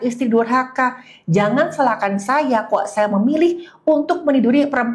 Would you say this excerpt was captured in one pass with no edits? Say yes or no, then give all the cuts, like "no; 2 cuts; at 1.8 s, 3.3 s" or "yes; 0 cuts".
yes; 0 cuts